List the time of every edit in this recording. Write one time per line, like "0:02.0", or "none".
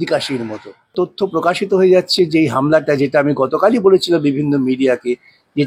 0:00.9